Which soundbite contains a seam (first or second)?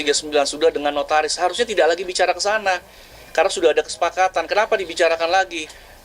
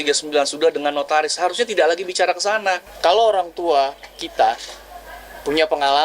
second